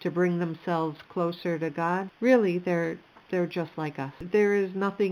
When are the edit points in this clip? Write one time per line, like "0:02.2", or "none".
0:04.2